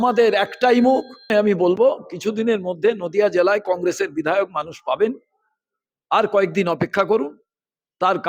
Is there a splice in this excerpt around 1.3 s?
yes; 1 cut; at 1.3 s

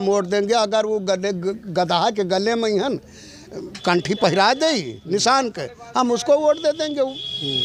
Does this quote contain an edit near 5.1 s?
no; 0 cuts

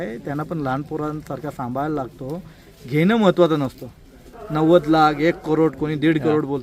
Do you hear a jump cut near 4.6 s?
no; 0 cuts

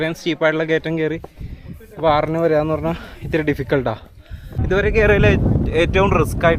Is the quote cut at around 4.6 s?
yes; 1 cut; at 4.6 s

